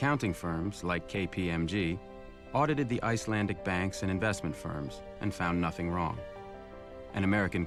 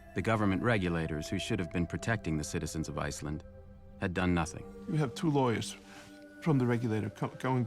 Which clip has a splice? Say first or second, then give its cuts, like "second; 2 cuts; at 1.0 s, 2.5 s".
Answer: second; 1 cut; at 4.7 s